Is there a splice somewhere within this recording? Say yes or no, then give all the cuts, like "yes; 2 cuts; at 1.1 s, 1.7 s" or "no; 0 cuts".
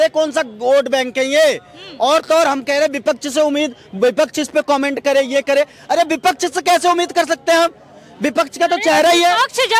no; 0 cuts